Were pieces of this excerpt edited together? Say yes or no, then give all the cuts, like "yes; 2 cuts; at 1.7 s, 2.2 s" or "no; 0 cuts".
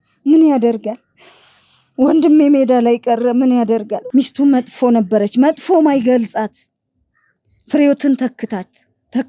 no; 0 cuts